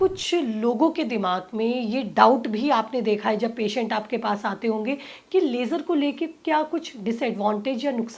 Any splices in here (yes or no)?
no